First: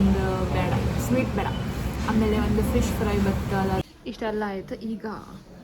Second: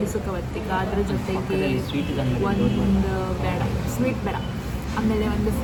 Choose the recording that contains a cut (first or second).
first